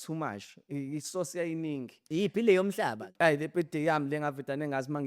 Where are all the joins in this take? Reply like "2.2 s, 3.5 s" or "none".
3.0 s